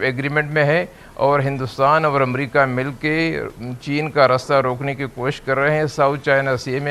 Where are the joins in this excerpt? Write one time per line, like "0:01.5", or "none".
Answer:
none